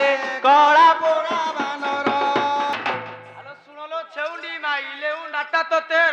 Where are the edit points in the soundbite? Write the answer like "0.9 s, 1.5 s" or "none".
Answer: 2.7 s